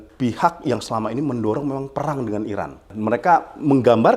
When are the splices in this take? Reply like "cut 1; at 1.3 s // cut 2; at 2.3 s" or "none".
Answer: cut 1; at 2.9 s